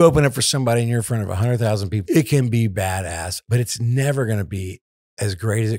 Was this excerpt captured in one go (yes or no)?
no